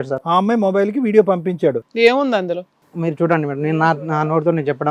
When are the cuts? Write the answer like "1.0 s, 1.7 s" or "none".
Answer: 1.8 s